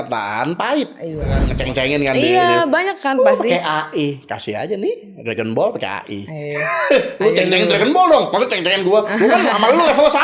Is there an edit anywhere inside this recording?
yes; 1 cut; at 1.5 s

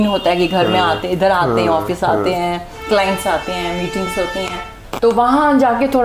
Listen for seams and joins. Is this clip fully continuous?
no; 1 cut; at 4.8 s

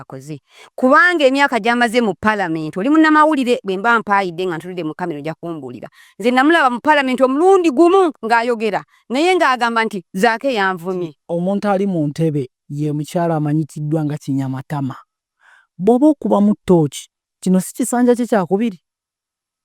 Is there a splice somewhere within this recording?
yes; 1 cut; at 11.2 s

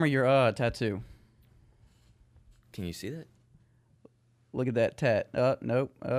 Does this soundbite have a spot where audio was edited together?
no; 0 cuts

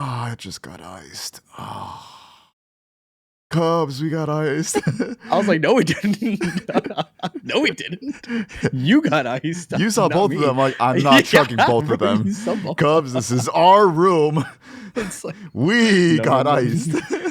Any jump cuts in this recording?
no; 0 cuts

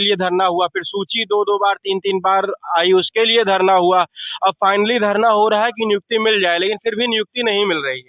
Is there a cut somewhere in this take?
no; 0 cuts

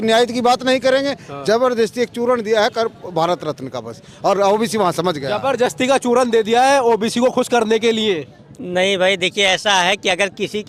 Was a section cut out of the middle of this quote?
no; 0 cuts

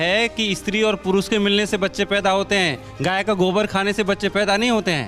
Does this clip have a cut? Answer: no; 0 cuts

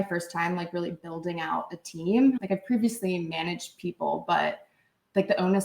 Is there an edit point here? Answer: yes; 1 cut; at 2.4 s

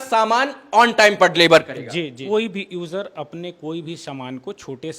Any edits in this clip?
yes; 1 cut; at 2.2 s

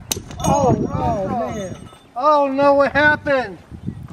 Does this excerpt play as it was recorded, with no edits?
yes; 0 cuts

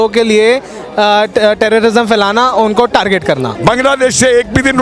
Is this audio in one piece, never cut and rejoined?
no; 1 cut; at 3.5 s

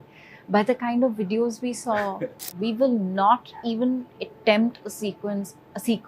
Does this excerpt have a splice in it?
yes; 1 cut; at 2.5 s

